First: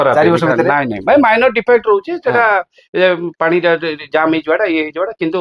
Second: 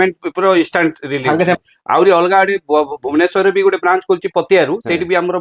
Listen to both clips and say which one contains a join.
second; 1 cut; at 1.6 s

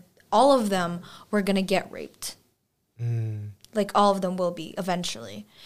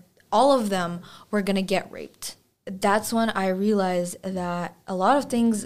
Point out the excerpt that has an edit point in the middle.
second; 1 cut; at 2.6 s

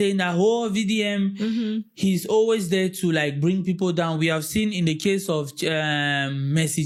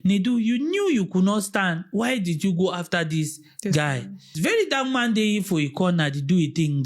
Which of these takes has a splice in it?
second; 1 cut; at 4.3 s

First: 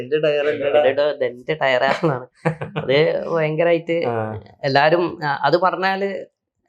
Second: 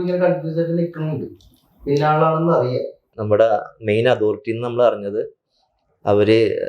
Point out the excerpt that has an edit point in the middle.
second; 1 cut; at 3.1 s

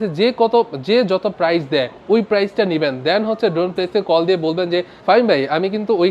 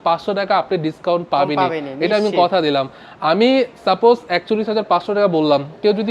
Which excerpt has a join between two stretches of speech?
first; 2 cuts; at 1.9 s, 4.9 s

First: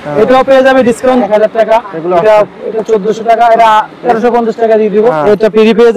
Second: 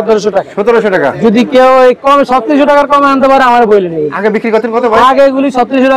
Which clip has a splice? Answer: first; 2 cuts; at 1.2 s, 5.2 s

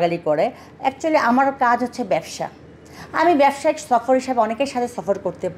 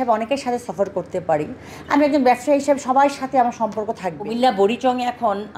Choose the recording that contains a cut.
second; 1 cut; at 4.2 s

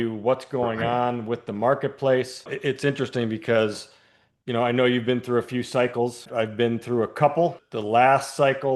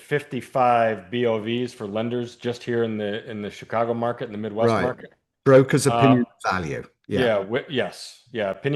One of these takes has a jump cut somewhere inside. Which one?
first; 3 cuts; at 2.5 s, 6.3 s, 7.7 s

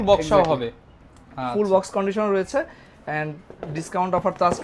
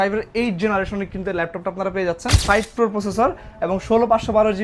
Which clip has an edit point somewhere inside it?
second; 1 cut; at 2.4 s

